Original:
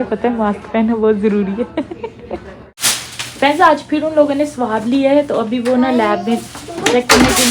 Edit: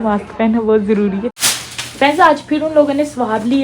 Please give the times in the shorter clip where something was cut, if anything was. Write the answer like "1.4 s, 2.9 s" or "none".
1.3 s